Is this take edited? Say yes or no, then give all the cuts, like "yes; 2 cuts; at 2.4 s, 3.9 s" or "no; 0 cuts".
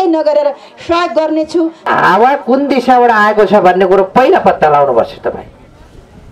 yes; 1 cut; at 1.9 s